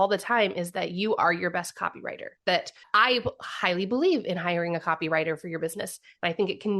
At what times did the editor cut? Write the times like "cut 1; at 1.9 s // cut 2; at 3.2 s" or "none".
cut 1; at 2.8 s